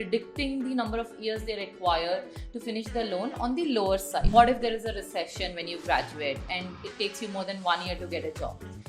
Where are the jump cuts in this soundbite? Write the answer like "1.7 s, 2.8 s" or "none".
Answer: 4.3 s

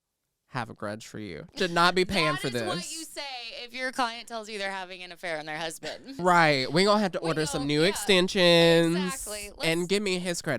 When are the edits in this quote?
1.5 s, 6.2 s

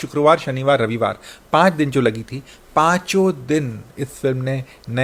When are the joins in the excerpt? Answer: none

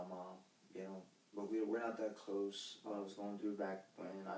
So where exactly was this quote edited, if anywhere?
2.7 s

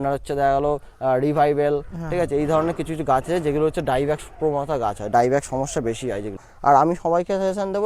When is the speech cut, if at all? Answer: 6.5 s

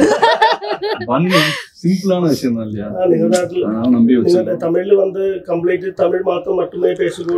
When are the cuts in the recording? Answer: none

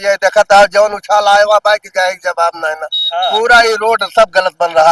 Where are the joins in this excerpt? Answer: none

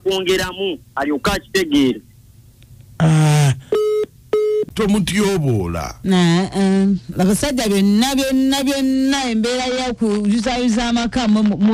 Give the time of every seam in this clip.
4.7 s

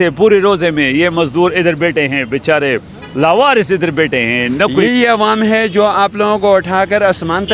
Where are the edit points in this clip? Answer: 4.7 s

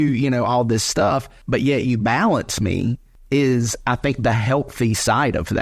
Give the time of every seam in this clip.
1.4 s, 3.1 s

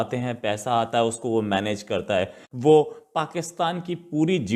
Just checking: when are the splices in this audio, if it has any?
2.4 s

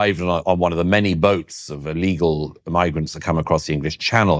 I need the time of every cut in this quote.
none

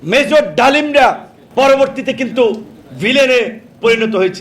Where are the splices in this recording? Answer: 1.3 s

